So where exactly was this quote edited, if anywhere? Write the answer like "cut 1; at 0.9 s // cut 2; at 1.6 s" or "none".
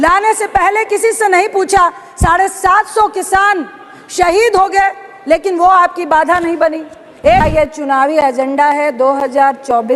cut 1; at 7.4 s